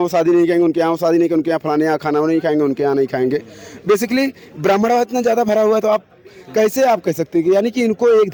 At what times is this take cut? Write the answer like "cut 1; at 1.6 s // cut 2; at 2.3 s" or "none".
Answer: none